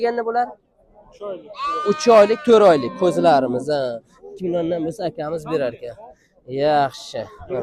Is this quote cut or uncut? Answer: uncut